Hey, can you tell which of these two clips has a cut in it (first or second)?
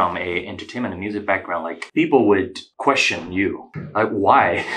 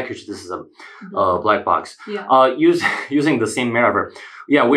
first